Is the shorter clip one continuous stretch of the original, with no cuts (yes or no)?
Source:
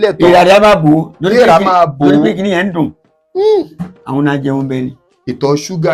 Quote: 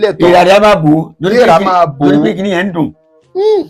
yes